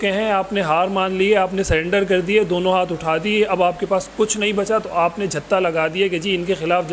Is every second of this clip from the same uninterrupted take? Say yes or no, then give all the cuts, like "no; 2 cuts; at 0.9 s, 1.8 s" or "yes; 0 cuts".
yes; 0 cuts